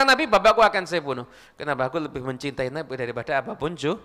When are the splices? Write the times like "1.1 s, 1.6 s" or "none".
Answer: none